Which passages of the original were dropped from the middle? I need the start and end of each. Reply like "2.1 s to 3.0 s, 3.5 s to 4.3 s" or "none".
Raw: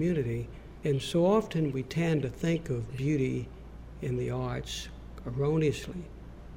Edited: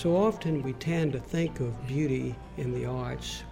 3.5 s to 3.9 s